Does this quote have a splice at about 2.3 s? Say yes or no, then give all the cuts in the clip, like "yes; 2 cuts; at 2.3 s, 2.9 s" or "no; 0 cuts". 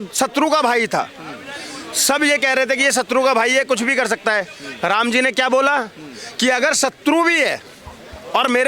no; 0 cuts